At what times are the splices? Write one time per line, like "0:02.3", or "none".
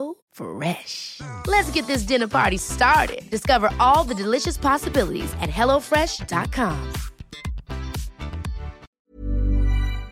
0:09.0